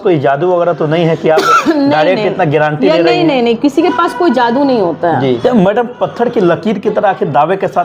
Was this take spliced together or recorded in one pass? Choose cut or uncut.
cut